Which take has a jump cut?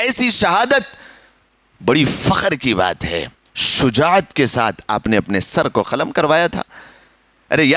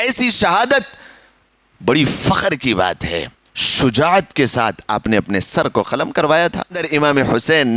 second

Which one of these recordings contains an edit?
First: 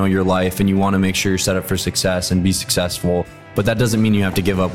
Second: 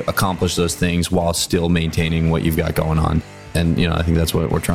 second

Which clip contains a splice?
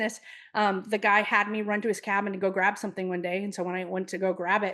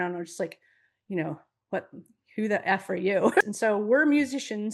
second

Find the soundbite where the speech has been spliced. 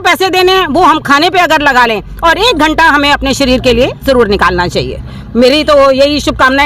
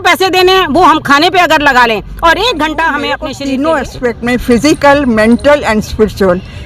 second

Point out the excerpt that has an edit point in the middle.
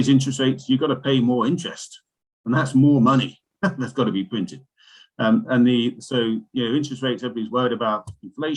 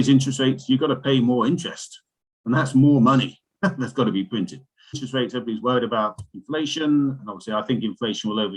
second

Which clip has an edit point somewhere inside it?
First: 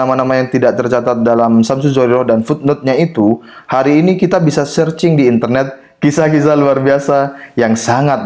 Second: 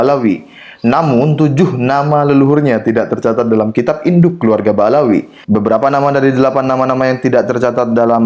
second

